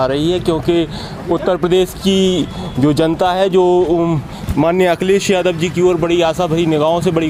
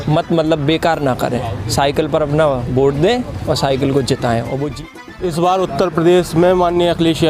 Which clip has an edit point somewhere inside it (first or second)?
second